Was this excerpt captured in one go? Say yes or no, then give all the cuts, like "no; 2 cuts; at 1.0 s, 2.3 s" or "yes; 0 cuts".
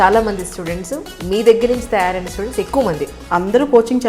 no; 1 cut; at 3.2 s